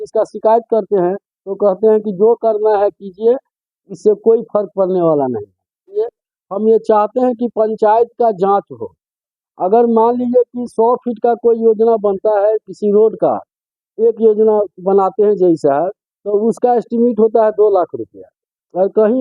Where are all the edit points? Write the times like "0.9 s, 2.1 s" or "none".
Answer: 6.0 s